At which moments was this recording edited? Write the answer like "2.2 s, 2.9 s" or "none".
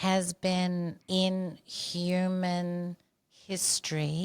1.0 s